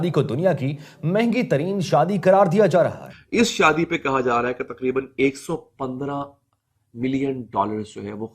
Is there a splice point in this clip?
yes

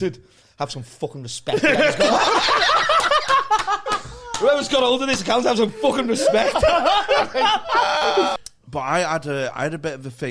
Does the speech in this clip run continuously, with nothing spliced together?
no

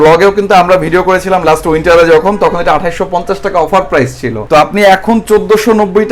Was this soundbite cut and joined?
no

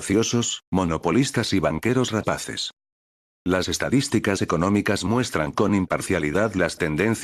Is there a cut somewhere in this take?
no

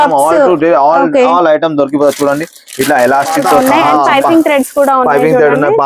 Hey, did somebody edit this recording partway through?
yes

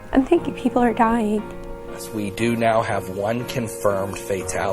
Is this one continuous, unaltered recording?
no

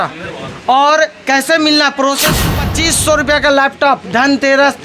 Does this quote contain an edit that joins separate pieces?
yes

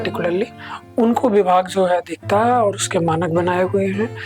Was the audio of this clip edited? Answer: no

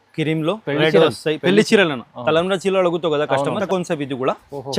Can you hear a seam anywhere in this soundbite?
yes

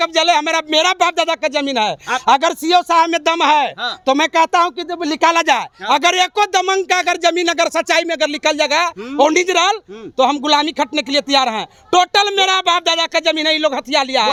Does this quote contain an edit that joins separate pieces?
no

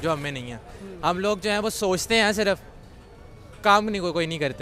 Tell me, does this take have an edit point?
no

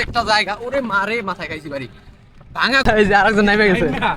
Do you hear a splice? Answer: yes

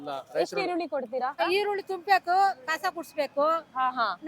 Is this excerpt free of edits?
no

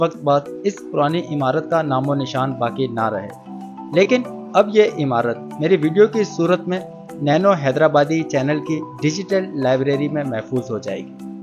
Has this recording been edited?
no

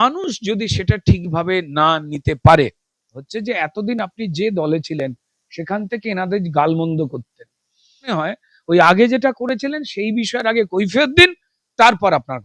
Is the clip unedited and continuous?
no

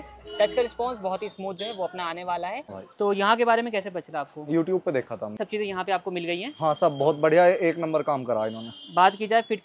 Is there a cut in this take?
yes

